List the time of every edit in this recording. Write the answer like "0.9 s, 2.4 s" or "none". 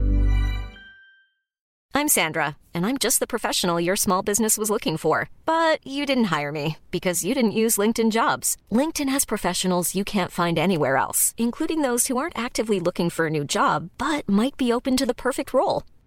1.7 s